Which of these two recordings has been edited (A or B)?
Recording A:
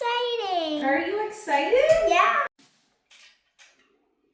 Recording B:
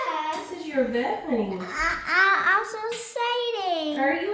A